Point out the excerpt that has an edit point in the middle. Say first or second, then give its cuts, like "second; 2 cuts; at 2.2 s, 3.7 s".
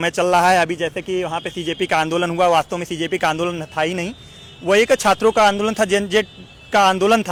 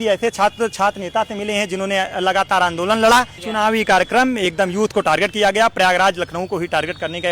second; 1 cut; at 3.5 s